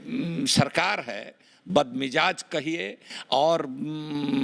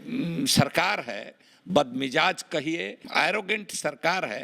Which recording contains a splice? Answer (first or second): second